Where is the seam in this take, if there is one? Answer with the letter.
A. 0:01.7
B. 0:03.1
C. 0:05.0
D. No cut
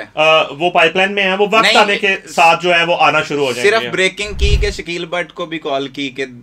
D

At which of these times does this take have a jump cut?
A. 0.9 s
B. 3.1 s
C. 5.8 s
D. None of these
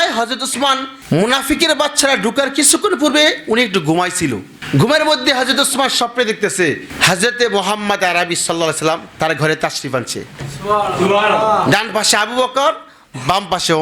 A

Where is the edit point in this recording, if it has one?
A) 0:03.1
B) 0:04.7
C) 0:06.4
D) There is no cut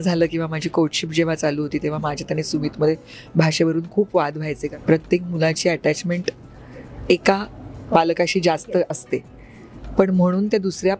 B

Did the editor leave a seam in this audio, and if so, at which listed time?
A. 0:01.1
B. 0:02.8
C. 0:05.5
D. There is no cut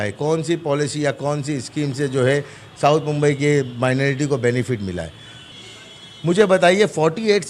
C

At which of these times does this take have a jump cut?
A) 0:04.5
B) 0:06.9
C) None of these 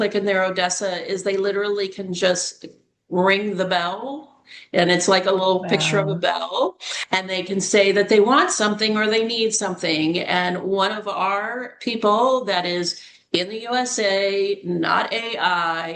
B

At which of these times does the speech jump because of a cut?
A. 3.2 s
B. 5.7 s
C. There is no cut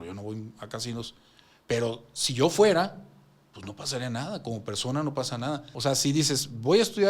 B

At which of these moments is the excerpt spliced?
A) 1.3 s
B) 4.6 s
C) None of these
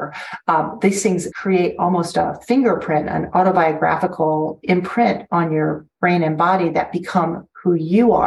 A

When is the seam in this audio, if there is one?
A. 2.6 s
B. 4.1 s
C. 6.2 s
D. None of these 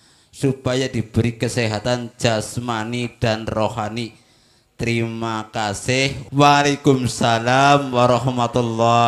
C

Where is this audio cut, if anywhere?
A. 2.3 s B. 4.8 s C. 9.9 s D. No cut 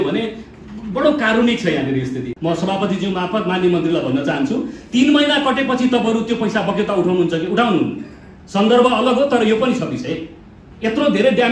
A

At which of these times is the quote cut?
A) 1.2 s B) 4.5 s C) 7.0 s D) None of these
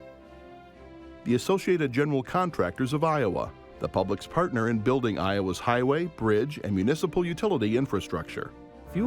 A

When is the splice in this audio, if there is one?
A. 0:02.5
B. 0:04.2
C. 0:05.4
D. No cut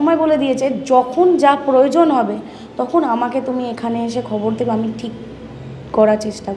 D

